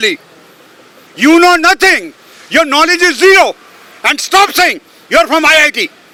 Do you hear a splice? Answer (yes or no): no